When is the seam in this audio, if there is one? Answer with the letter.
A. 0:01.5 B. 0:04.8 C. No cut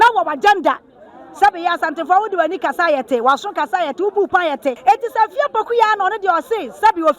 B